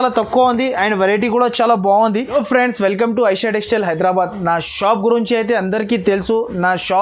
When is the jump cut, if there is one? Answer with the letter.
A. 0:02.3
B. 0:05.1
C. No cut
A